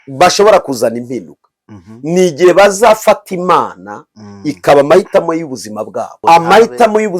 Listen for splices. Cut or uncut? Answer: cut